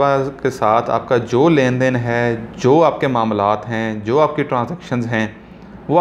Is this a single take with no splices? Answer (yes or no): yes